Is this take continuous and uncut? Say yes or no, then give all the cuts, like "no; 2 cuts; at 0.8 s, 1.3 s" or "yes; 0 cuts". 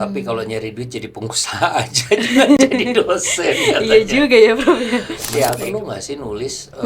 no; 1 cut; at 5.6 s